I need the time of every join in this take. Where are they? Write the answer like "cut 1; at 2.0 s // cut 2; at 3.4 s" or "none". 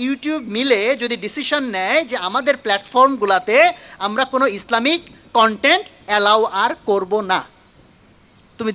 none